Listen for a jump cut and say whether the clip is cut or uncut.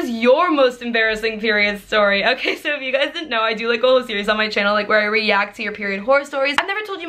uncut